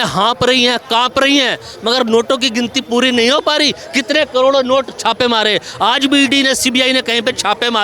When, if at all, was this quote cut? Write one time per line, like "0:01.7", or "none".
none